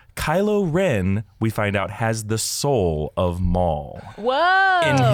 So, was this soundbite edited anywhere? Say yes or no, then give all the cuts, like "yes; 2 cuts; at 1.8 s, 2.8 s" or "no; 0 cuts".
no; 0 cuts